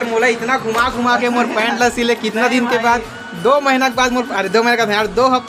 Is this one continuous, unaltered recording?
yes; 0 cuts

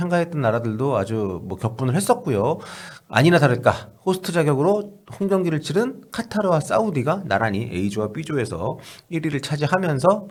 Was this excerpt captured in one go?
yes; 0 cuts

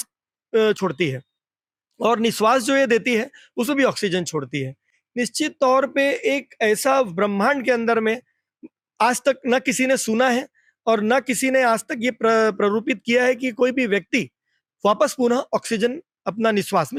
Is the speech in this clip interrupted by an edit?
no; 0 cuts

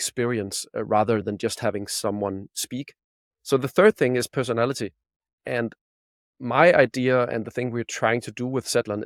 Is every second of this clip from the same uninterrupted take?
yes; 0 cuts

